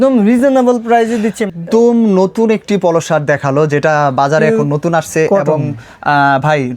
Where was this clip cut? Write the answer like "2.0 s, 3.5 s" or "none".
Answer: 1.4 s